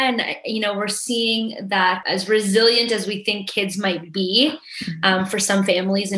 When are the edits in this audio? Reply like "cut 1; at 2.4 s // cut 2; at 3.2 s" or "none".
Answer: cut 1; at 2.0 s